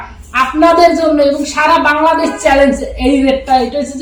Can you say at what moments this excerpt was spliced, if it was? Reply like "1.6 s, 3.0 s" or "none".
none